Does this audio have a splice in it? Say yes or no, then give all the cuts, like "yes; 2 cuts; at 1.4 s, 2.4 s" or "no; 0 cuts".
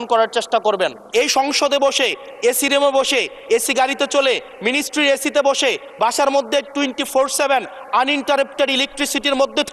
yes; 1 cut; at 1.0 s